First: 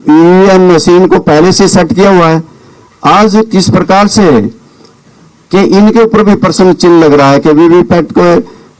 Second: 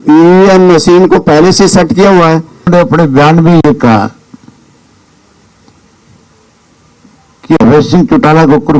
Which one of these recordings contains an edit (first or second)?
second